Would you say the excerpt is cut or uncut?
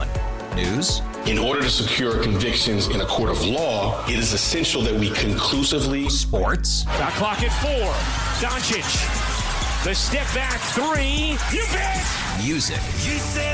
uncut